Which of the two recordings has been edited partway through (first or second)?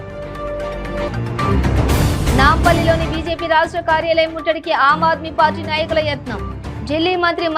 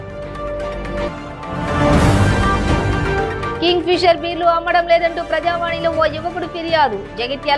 first